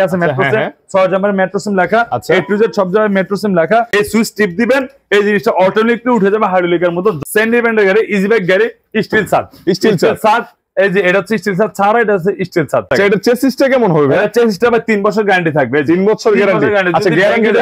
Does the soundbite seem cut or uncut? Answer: cut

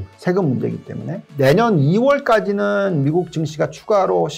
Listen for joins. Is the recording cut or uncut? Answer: cut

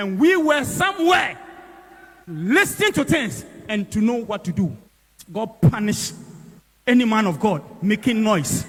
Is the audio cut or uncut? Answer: uncut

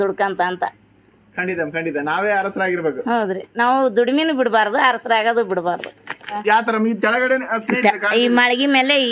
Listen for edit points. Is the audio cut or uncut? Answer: cut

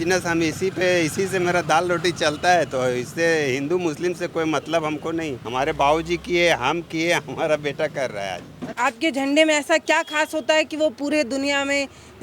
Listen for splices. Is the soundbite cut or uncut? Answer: cut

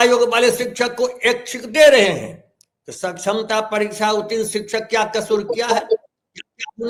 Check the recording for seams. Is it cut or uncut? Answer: uncut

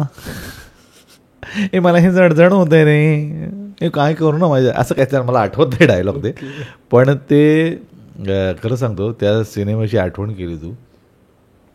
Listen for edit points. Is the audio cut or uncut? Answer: uncut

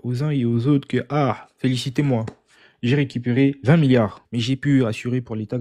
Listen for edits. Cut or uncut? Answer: cut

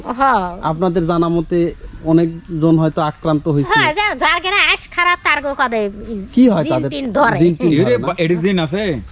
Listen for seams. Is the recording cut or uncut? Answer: uncut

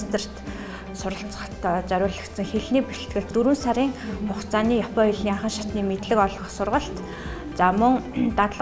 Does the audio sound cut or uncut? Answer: cut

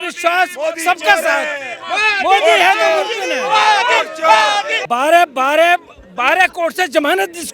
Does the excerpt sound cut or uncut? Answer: cut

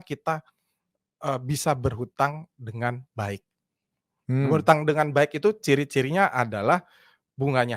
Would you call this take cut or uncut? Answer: uncut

